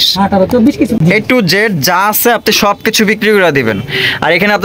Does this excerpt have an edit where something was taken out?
yes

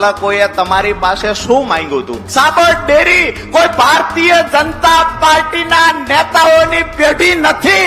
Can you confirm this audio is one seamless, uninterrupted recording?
no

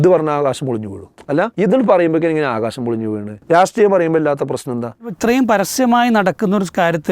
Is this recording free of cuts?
no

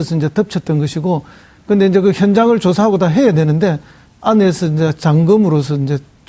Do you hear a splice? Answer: no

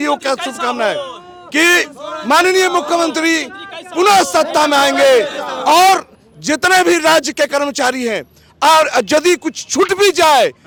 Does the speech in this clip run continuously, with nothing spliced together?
yes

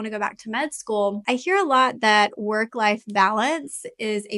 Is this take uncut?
no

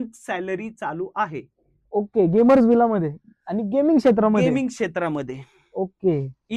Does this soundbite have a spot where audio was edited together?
no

